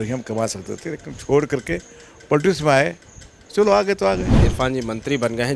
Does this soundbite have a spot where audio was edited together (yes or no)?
yes